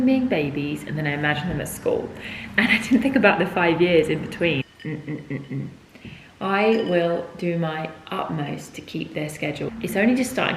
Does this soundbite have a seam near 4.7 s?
yes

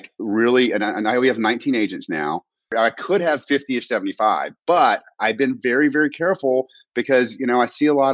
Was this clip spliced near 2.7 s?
yes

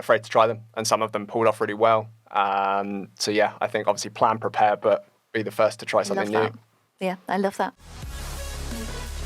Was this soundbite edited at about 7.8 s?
yes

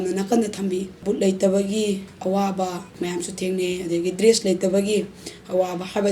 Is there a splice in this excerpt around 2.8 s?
yes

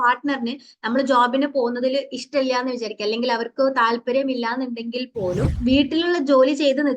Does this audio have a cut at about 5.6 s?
yes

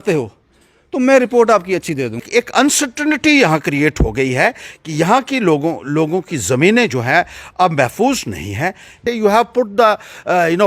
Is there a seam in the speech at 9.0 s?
yes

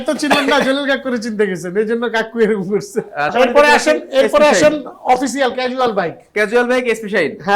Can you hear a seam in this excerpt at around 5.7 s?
no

